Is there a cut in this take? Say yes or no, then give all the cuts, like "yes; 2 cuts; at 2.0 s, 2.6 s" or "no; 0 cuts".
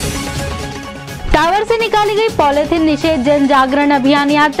yes; 1 cut; at 1.1 s